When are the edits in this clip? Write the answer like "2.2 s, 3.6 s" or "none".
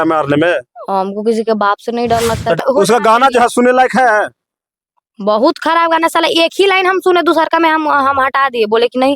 2.6 s